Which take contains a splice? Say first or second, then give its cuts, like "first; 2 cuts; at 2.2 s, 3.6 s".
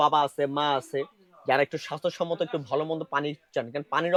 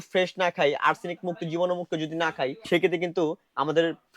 second; 1 cut; at 2.6 s